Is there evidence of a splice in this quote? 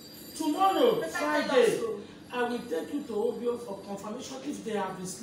no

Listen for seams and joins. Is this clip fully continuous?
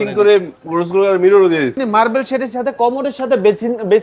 no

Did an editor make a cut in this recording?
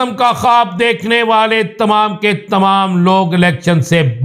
no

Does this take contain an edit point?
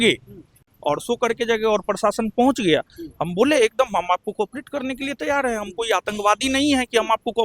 no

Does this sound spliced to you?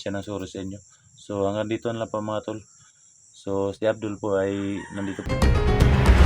yes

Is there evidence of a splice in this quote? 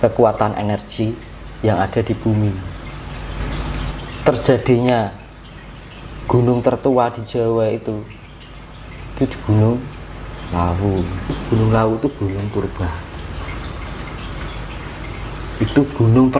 yes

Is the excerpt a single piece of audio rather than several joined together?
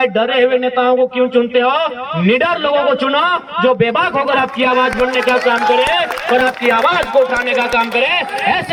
yes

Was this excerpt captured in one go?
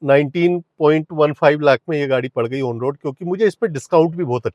yes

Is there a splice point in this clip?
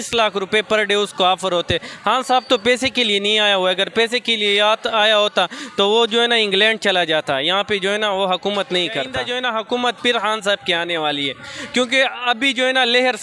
yes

